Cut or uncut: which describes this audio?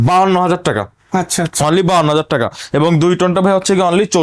uncut